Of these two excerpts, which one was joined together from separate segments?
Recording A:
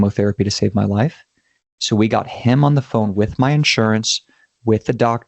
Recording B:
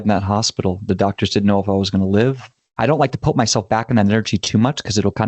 B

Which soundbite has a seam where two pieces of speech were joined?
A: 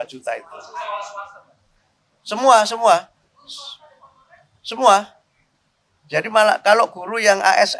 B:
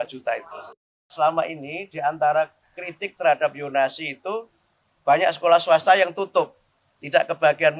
B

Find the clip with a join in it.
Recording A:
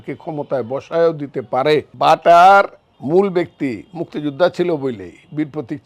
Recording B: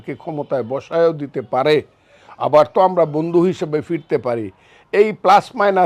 A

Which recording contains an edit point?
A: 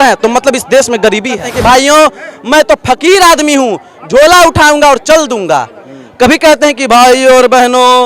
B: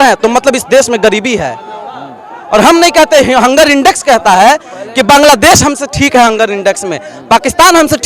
A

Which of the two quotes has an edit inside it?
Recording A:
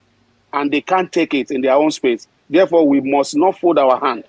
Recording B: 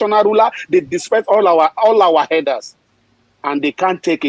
B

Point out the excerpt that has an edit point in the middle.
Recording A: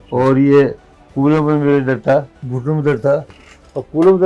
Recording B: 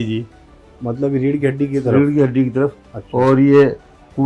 A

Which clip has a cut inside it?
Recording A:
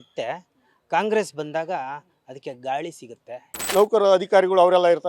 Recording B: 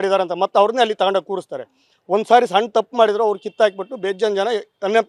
A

